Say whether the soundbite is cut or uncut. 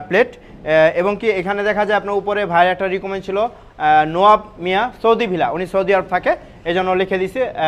uncut